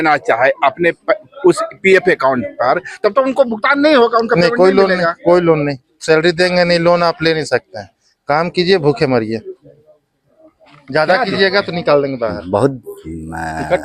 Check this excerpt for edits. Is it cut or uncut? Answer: uncut